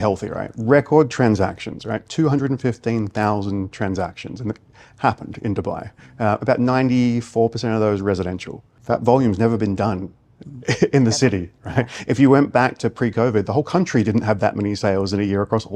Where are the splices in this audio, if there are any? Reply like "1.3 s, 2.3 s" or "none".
8.7 s